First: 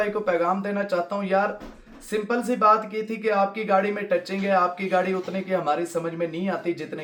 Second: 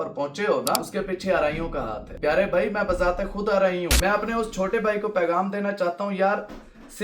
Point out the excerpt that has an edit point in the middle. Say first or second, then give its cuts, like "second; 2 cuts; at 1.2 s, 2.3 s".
second; 3 cuts; at 0.9 s, 2.0 s, 3.9 s